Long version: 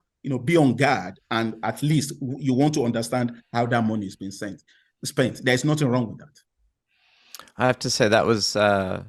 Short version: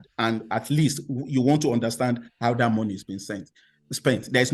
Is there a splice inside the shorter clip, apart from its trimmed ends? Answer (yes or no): no